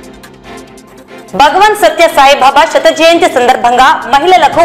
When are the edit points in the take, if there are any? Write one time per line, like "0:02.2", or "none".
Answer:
0:01.0